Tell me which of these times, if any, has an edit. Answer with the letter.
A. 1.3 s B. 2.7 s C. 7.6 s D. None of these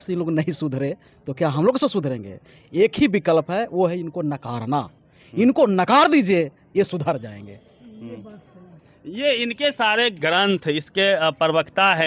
D